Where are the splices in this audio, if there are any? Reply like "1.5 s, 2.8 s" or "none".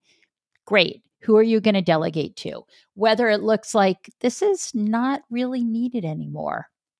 none